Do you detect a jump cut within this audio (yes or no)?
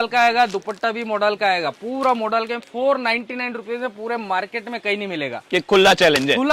no